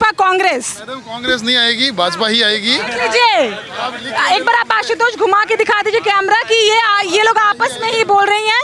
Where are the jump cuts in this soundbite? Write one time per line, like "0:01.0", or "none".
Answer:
none